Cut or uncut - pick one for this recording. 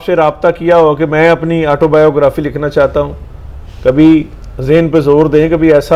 uncut